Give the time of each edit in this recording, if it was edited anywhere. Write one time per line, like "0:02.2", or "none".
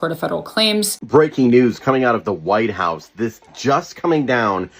0:01.0